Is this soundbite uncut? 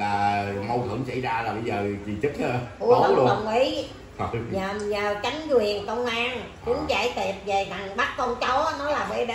yes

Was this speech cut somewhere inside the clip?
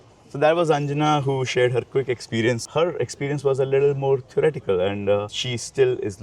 yes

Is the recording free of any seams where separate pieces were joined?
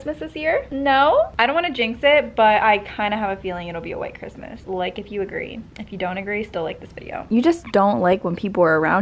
yes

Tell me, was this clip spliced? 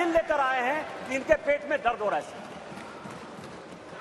no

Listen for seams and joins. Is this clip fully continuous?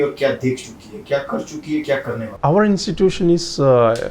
no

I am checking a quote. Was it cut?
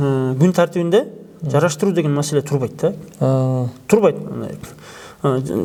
no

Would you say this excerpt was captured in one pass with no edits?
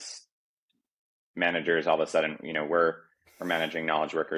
yes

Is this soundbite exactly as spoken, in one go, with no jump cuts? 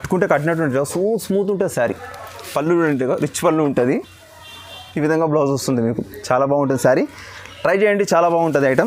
yes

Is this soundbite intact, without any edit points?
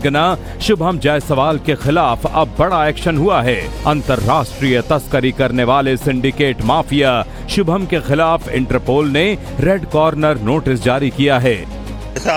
yes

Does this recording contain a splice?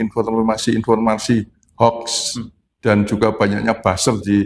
no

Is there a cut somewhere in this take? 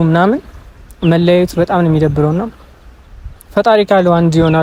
no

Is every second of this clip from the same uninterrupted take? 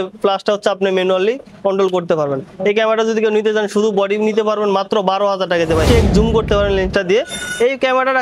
no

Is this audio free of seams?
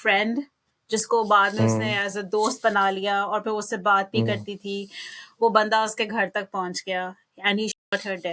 yes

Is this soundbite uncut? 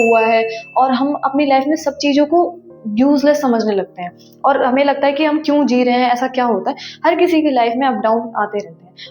yes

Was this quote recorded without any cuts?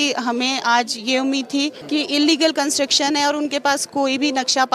no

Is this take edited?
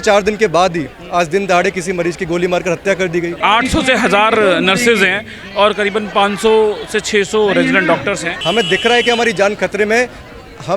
yes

